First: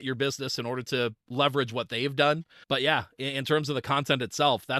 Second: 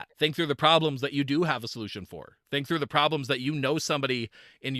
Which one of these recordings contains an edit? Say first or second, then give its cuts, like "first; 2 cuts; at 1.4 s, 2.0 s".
first; 2 cuts; at 1.2 s, 2.5 s